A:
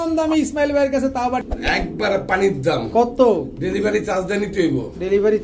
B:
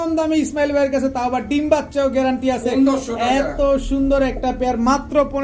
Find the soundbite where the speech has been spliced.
A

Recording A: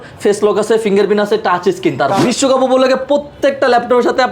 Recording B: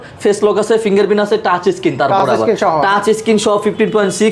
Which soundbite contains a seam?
A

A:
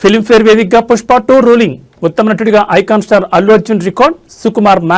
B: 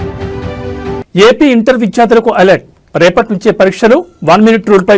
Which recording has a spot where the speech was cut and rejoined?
B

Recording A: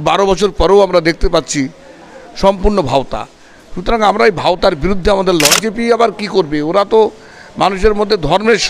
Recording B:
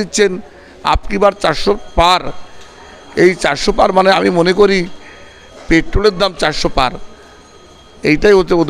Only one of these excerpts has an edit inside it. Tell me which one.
A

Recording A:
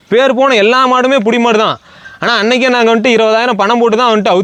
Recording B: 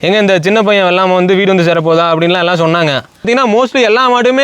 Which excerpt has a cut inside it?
B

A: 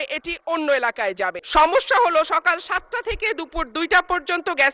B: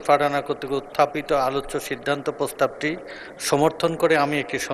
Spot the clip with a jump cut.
A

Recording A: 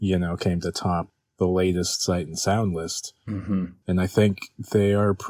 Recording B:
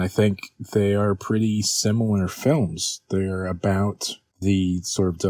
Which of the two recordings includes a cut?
A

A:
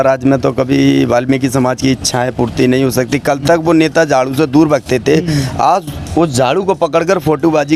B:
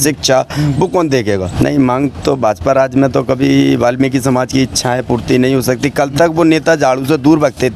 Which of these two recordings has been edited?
B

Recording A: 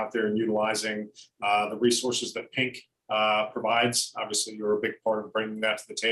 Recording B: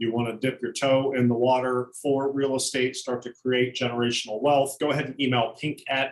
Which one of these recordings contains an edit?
B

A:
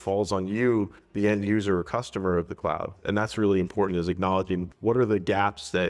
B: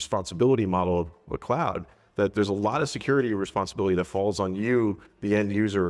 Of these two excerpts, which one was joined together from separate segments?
A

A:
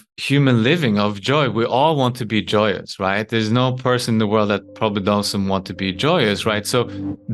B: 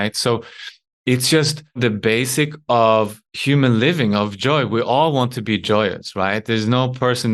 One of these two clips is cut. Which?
B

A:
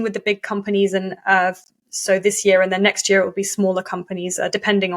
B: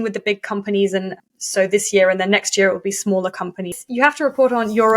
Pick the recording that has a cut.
B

